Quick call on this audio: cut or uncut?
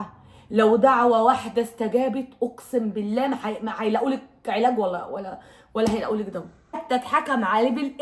cut